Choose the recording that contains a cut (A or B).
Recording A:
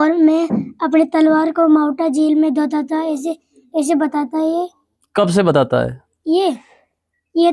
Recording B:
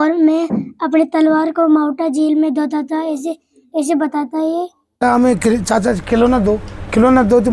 B